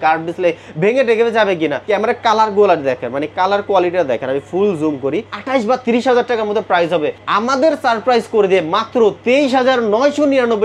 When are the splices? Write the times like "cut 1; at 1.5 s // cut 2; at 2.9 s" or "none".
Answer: cut 1; at 1.8 s // cut 2; at 5.3 s